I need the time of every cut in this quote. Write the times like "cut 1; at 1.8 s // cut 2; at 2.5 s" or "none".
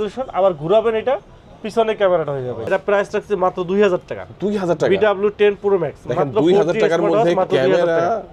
cut 1; at 2.6 s